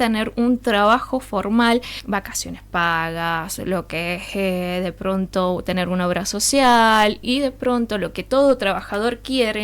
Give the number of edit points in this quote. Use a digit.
1